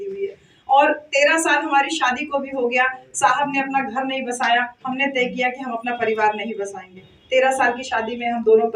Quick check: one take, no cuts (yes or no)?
yes